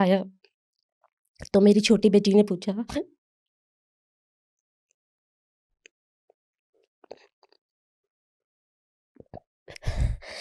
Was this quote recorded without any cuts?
yes; 0 cuts

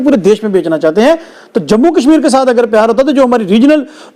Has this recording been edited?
no; 0 cuts

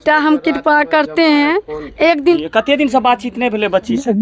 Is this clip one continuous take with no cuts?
no; 1 cut; at 2.4 s

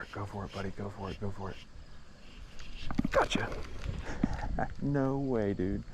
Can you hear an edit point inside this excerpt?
no; 0 cuts

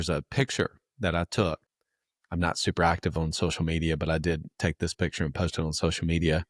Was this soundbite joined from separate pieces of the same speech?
no; 0 cuts

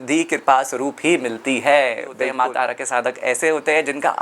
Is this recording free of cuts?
no; 1 cut; at 2.2 s

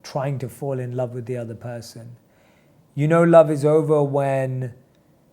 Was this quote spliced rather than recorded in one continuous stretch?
no; 0 cuts

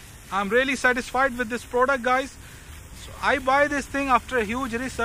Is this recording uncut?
yes; 0 cuts

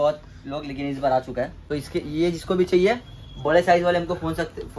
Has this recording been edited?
yes; 1 cut; at 1.6 s

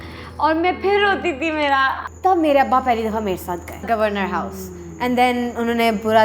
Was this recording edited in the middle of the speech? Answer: yes; 2 cuts; at 2.1 s, 3.8 s

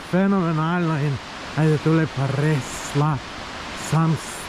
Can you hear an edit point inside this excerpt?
no; 0 cuts

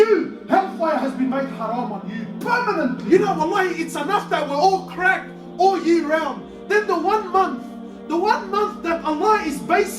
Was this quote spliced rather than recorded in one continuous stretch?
yes; 1 cut; at 3.0 s

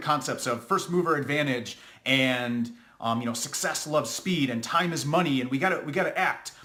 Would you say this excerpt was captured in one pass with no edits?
yes; 0 cuts

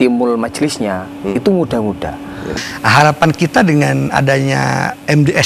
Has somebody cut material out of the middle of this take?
yes; 1 cut; at 2.6 s

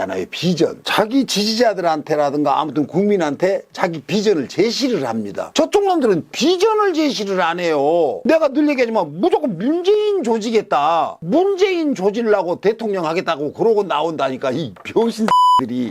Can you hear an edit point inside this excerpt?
no; 0 cuts

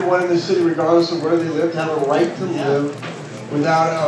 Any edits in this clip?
no; 0 cuts

